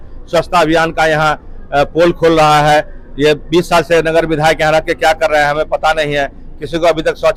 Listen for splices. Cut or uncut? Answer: uncut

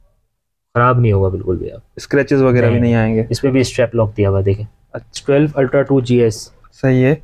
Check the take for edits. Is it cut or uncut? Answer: cut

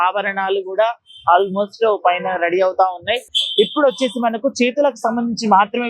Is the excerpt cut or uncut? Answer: cut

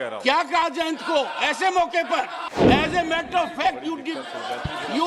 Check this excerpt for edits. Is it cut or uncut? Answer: cut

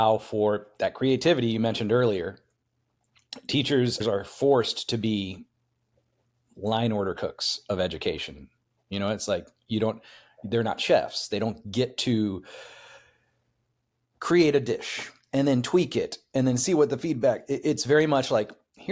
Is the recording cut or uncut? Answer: uncut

